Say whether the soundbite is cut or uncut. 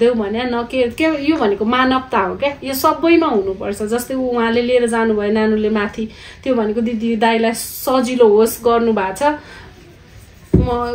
uncut